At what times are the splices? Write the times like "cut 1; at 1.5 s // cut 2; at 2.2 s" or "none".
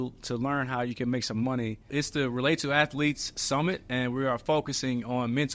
cut 1; at 1.9 s